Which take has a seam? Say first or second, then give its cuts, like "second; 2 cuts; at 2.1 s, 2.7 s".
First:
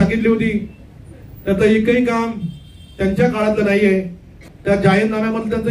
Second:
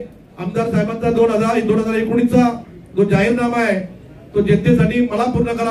first; 1 cut; at 4.4 s